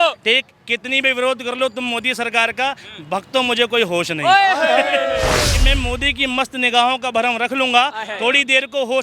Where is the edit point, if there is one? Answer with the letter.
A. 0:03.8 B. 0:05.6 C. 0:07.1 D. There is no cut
B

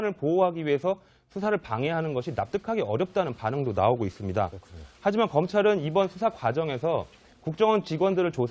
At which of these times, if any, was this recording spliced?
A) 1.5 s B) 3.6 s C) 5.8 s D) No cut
C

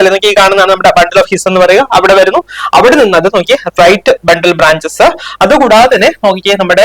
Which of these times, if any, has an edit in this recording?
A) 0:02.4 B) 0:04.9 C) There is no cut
C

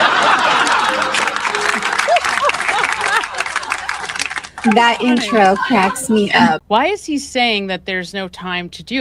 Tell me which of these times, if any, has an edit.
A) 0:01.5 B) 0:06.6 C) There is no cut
B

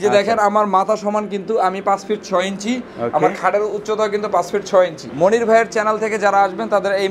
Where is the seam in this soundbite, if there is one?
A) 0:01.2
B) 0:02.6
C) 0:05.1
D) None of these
C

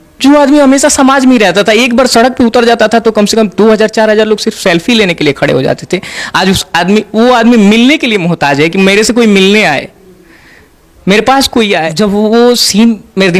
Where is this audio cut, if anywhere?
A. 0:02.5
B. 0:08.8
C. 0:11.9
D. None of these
C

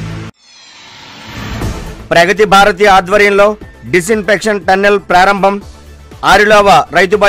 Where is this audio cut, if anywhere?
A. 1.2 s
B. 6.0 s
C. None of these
A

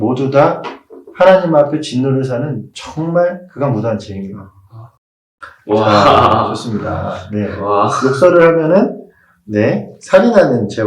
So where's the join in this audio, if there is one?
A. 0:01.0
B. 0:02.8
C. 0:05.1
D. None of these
C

